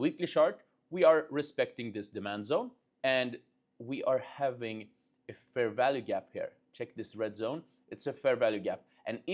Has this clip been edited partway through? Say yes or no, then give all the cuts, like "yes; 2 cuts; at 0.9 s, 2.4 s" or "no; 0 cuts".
no; 0 cuts